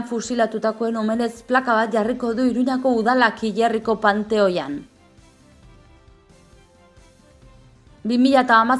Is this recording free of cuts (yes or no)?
yes